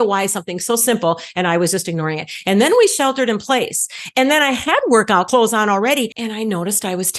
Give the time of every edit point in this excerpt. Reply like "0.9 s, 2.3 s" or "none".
5.3 s

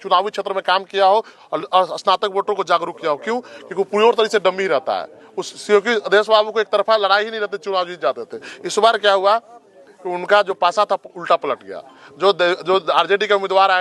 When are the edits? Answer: none

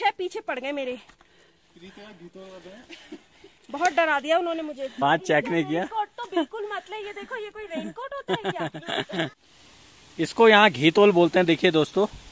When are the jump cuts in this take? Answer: 5.0 s, 9.4 s

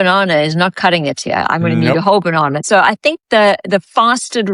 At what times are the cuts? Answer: 2.6 s

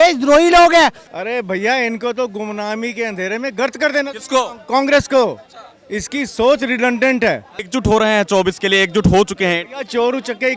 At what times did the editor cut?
1.1 s, 7.5 s

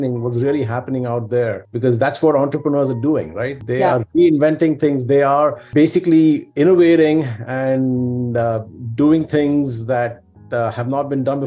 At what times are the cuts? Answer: none

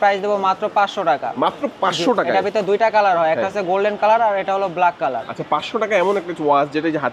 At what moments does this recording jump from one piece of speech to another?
none

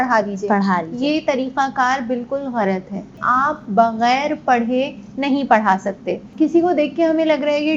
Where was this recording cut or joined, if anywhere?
3.2 s, 6.2 s

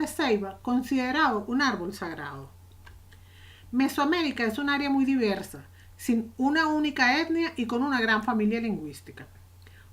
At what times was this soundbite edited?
7.4 s

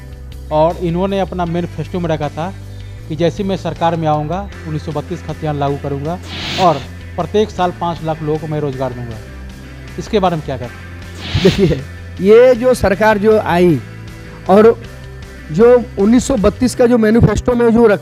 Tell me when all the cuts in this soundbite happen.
none

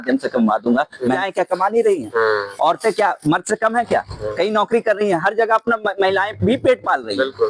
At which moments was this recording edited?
1.2 s

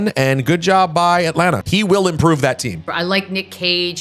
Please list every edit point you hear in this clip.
1.6 s, 2.8 s

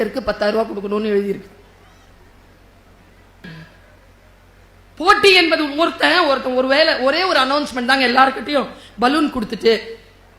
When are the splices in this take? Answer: 3.4 s

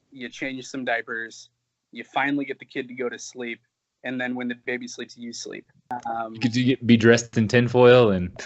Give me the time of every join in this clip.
5.8 s

